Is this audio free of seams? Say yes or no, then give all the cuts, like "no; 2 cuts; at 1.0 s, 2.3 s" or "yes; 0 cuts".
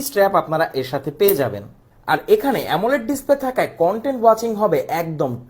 no; 1 cut; at 1.9 s